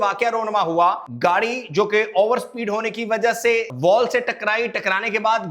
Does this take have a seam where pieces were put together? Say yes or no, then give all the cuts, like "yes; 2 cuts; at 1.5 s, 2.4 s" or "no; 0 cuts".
yes; 2 cuts; at 1.1 s, 3.7 s